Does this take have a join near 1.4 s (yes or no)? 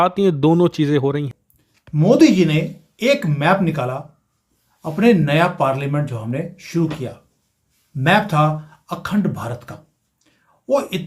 yes